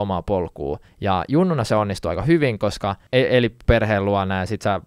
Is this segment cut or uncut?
cut